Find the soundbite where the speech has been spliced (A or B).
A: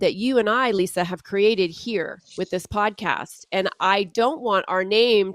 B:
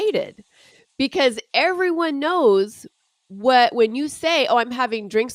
A